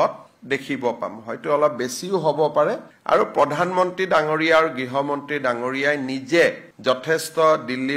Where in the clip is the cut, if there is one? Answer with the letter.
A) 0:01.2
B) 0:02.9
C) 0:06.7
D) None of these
B